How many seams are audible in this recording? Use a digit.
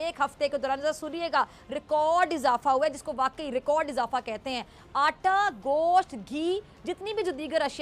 0